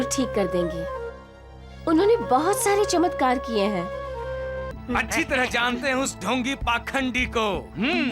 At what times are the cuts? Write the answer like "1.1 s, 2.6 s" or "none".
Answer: 4.7 s